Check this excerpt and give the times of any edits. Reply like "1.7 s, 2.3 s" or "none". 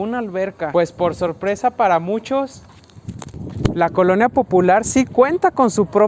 none